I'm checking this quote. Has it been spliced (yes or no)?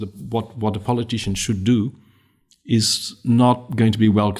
no